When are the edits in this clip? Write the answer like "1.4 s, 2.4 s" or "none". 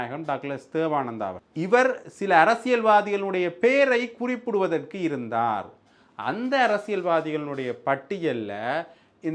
1.4 s